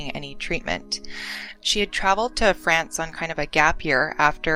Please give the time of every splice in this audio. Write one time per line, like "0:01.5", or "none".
0:01.6